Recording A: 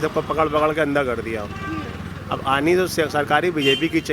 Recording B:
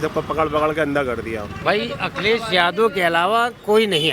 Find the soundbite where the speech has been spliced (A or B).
B